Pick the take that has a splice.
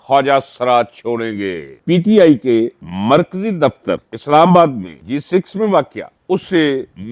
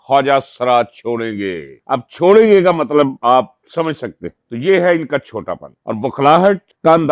first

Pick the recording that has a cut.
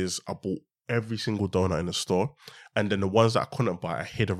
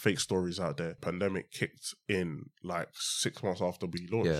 second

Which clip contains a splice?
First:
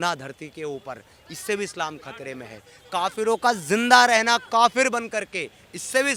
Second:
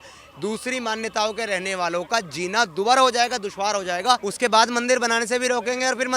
second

